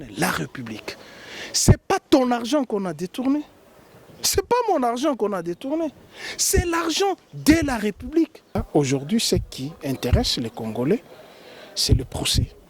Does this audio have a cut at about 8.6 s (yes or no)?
yes